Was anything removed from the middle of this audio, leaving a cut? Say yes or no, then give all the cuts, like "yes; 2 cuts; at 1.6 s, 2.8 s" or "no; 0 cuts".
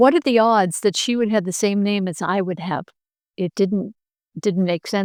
no; 0 cuts